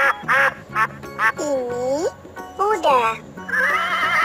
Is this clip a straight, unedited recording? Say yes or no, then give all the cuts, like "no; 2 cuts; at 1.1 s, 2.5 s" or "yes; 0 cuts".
no; 1 cut; at 1.3 s